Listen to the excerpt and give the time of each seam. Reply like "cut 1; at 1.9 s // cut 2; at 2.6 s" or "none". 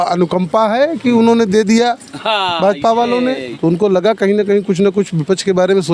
cut 1; at 3.5 s

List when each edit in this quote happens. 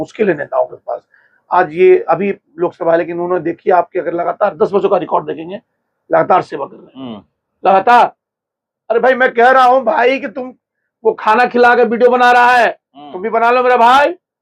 none

